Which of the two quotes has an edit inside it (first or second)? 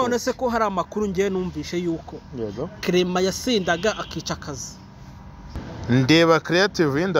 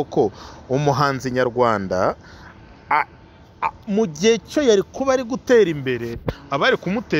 first